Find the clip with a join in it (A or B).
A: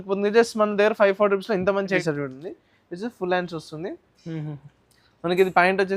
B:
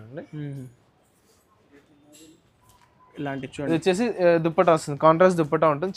A